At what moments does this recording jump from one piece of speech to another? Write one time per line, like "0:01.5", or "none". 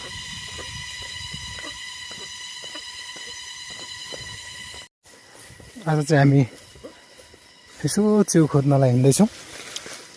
0:05.0